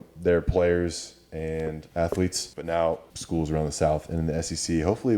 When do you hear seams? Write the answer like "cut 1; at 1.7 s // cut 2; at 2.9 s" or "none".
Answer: cut 1; at 1.8 s // cut 2; at 2.5 s // cut 3; at 3.1 s